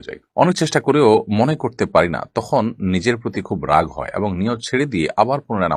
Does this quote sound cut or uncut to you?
uncut